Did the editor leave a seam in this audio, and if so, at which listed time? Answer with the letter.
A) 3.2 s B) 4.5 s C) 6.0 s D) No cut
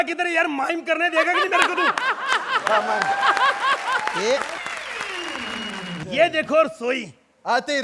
C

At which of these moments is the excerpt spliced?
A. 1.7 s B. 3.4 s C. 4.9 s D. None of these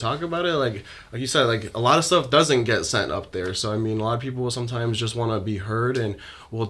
D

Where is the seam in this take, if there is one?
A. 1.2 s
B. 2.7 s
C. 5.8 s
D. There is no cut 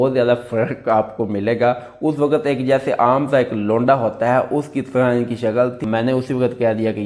C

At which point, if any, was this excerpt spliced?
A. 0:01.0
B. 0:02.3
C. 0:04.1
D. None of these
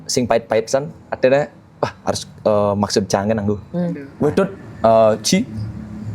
C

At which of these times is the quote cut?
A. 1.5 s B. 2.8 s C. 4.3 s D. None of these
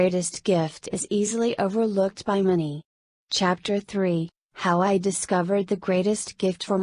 B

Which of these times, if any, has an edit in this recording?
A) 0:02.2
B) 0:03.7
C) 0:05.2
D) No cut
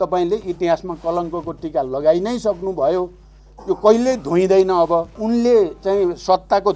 C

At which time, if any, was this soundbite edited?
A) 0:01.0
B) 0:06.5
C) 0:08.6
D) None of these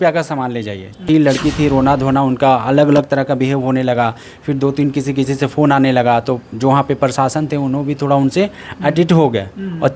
A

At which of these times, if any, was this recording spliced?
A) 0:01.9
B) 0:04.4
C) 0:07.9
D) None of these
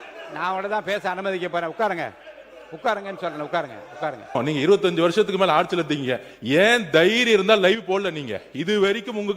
B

